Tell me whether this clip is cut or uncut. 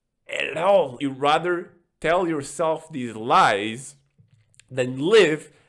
cut